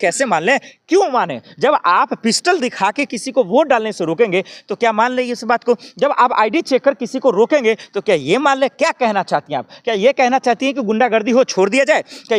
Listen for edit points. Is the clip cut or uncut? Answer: uncut